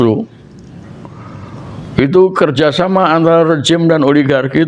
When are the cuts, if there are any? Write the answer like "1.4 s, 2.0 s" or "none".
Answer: none